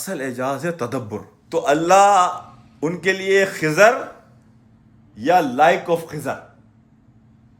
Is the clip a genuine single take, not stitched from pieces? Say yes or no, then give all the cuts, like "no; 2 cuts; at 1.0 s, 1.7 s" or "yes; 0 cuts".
no; 1 cut; at 1.3 s